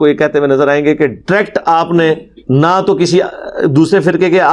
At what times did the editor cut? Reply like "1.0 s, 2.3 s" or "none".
2.3 s